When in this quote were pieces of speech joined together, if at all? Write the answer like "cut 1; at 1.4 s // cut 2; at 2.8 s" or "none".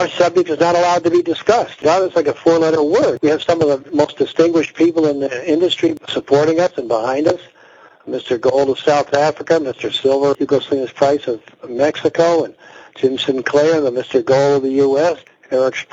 none